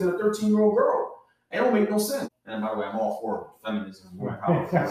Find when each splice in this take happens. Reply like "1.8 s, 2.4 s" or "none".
2.3 s